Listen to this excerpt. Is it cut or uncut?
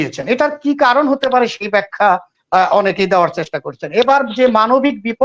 uncut